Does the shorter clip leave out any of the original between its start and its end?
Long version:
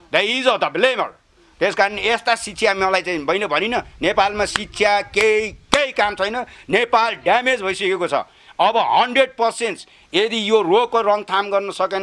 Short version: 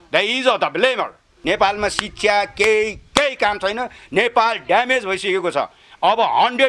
yes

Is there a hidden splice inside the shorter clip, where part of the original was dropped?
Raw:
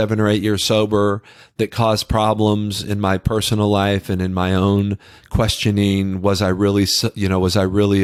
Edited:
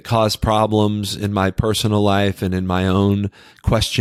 no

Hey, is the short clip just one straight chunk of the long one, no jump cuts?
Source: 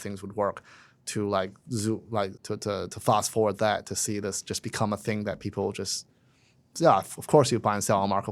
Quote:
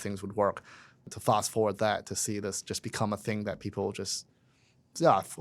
no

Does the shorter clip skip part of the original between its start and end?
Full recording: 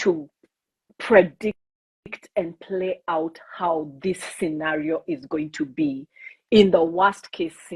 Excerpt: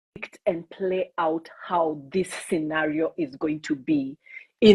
no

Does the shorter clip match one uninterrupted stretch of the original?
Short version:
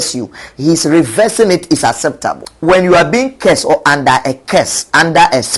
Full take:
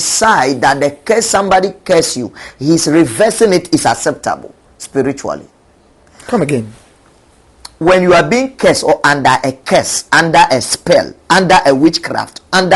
no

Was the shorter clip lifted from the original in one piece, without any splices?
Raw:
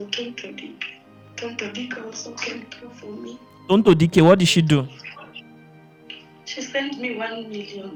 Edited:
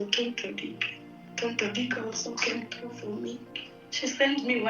no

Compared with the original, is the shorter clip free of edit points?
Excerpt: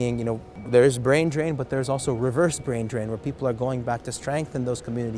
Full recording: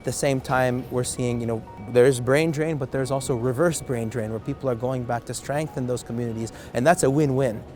yes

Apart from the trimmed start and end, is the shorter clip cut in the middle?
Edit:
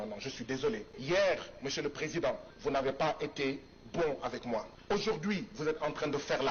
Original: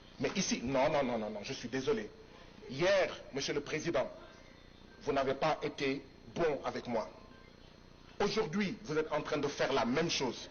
yes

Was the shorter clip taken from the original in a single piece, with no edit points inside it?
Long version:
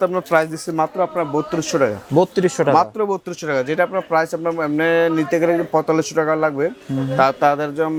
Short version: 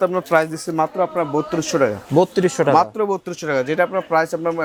yes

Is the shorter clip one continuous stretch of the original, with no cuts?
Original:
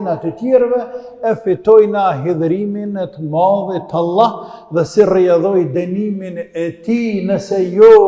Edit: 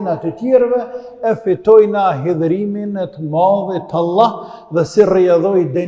yes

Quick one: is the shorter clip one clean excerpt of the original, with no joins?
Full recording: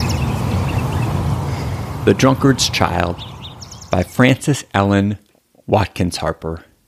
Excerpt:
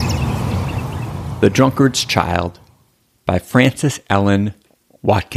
no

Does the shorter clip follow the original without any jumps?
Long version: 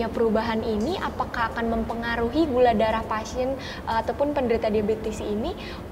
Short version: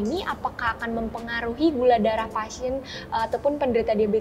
yes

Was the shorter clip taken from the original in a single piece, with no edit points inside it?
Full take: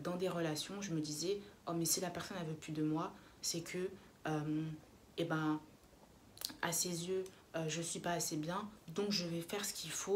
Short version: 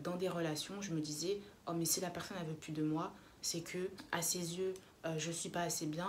no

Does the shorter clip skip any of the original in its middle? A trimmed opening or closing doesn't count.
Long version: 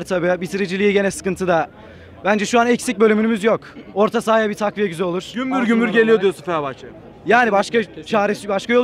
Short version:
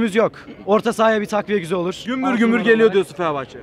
no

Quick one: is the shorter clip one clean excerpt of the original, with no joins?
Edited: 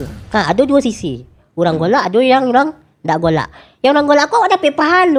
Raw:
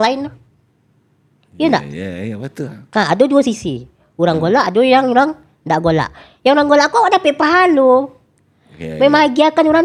yes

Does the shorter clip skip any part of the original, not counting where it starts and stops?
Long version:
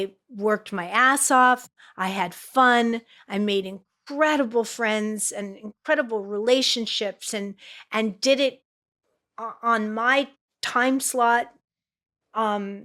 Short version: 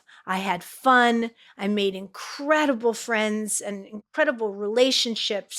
no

